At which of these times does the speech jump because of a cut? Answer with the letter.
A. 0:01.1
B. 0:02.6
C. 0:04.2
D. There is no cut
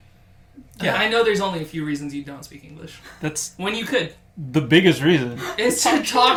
D